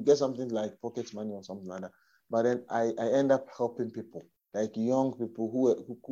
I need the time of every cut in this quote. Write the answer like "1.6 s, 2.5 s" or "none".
none